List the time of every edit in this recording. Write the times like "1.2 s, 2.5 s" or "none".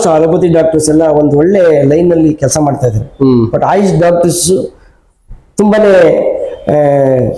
none